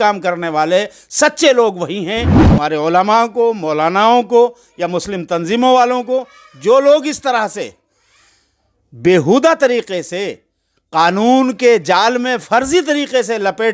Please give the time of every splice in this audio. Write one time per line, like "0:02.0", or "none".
0:02.3